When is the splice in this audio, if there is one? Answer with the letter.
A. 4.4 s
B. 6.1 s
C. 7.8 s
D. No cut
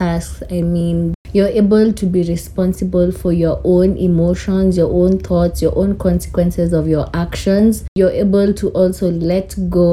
C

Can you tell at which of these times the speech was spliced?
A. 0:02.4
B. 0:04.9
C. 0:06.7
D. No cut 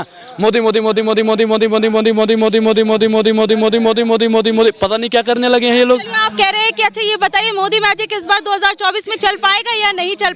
D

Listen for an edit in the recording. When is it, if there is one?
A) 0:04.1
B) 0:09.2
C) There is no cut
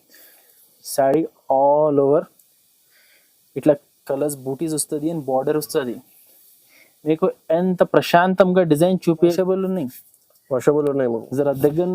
B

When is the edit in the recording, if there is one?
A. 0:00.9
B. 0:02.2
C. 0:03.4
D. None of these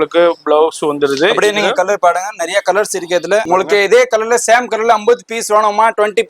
C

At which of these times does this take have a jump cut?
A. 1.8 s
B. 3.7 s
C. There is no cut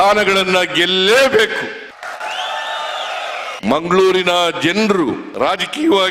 C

